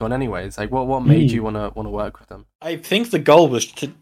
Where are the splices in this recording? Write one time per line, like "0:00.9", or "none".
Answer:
0:02.7